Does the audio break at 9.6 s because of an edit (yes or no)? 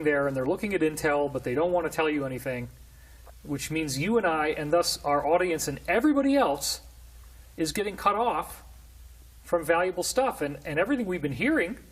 yes